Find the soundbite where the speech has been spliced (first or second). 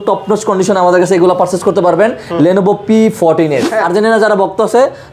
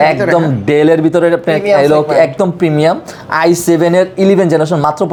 first